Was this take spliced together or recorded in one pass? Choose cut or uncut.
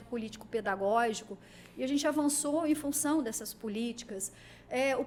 uncut